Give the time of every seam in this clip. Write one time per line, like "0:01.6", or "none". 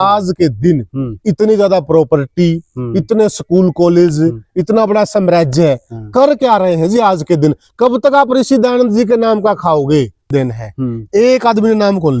0:10.3

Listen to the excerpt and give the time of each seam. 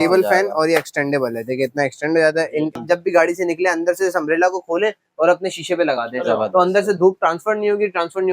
0:02.8

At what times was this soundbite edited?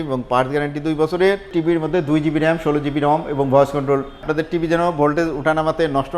0:01.5
0:04.2

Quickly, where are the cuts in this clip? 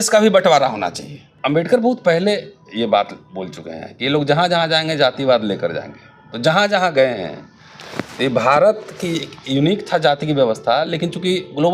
0:01.4

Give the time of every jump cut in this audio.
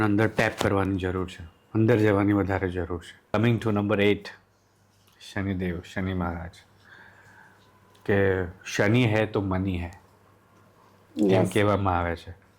0:03.3

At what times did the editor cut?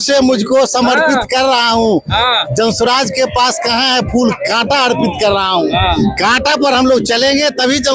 none

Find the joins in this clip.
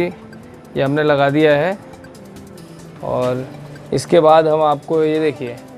none

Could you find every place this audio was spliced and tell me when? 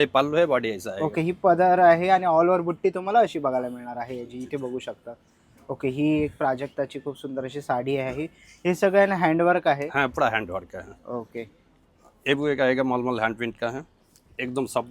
none

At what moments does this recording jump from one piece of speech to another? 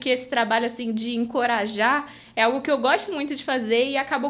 none

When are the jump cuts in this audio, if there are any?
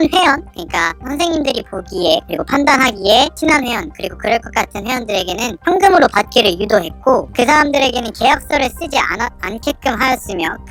none

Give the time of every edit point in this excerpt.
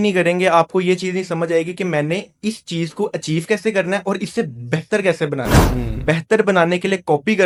none

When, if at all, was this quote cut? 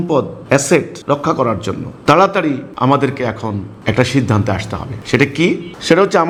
none

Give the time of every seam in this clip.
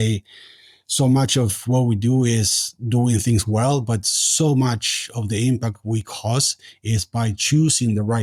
none

